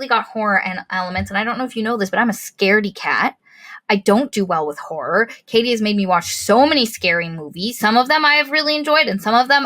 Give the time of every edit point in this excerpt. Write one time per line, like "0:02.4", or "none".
0:07.8